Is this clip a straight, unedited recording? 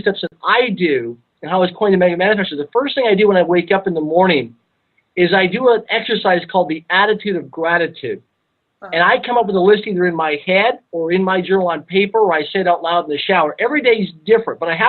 no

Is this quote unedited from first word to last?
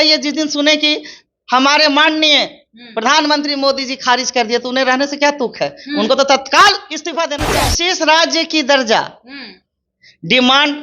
no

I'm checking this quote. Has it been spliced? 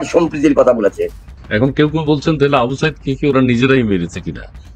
yes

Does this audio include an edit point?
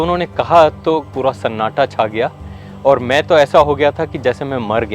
yes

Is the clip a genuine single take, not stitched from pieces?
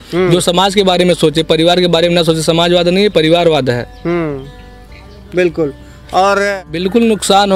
no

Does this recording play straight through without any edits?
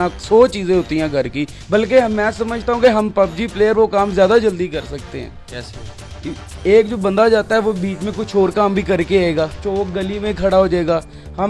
yes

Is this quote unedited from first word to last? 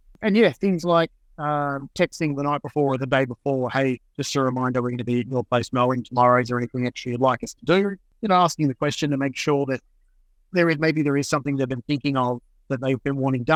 yes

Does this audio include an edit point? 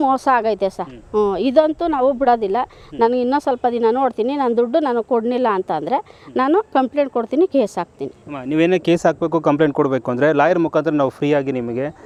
no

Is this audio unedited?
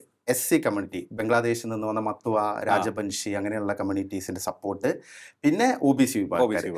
yes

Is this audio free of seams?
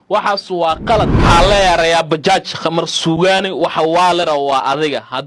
no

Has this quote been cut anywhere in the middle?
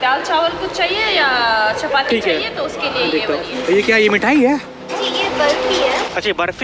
yes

